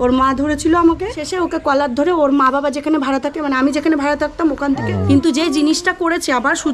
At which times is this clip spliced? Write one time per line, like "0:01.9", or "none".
0:01.3
0:04.8